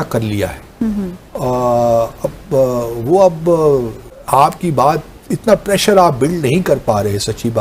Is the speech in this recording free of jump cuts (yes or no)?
yes